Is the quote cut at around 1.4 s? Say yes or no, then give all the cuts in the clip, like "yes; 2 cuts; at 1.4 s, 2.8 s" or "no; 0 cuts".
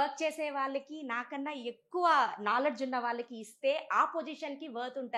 no; 0 cuts